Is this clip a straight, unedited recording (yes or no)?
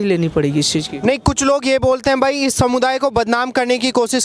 yes